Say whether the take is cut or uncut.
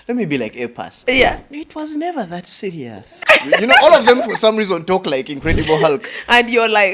cut